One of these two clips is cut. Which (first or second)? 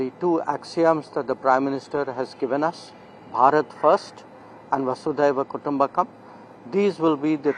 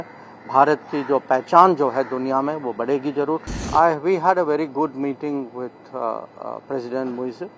second